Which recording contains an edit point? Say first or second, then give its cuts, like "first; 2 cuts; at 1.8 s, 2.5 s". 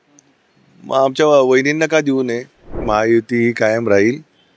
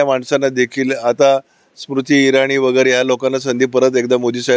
first; 1 cut; at 2.8 s